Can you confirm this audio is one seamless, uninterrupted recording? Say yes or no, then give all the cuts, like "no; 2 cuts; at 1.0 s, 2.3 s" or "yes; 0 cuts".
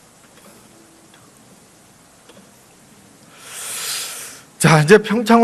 yes; 0 cuts